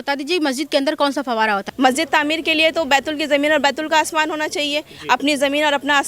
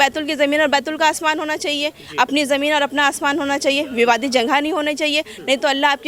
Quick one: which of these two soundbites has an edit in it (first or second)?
first